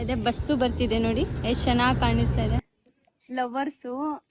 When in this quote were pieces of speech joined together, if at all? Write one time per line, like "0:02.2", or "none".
0:02.6